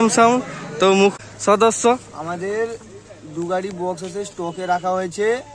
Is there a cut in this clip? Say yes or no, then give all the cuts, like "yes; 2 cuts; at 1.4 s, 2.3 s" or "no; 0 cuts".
yes; 1 cut; at 1.1 s